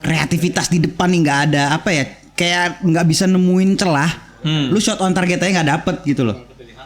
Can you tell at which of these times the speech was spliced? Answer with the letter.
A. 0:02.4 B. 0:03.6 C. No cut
C